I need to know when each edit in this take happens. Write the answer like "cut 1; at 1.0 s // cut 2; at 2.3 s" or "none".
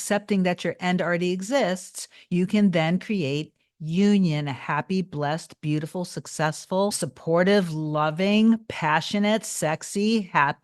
cut 1; at 7.1 s